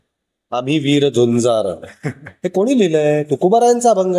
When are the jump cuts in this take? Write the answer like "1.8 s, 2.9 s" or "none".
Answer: none